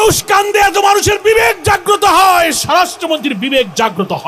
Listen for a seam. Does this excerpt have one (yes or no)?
no